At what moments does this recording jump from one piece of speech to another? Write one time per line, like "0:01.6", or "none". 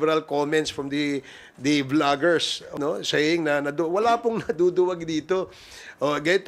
0:02.7